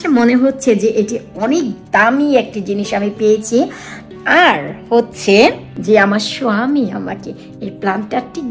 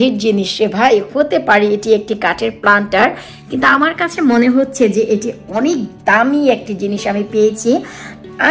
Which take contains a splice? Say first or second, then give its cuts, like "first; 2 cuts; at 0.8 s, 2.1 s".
first; 1 cut; at 5.7 s